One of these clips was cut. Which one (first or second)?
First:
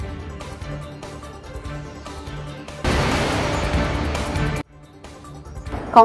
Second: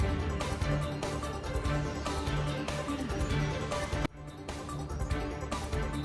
first